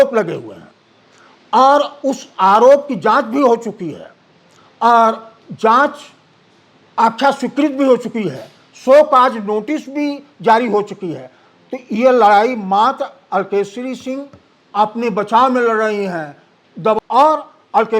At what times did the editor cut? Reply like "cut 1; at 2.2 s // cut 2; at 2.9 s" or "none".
cut 1; at 17.0 s